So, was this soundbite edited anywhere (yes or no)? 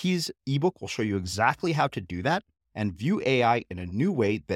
no